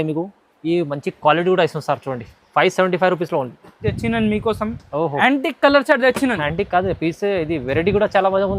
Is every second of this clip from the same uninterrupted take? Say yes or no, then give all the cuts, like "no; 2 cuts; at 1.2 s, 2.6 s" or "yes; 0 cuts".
no; 1 cut; at 3.8 s